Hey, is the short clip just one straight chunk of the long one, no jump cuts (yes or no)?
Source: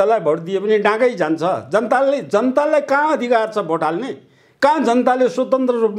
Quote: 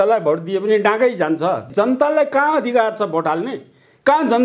no